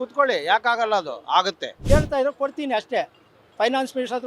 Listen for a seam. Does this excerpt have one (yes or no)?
yes